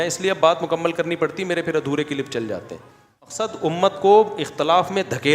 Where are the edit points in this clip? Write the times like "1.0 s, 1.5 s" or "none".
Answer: 3.3 s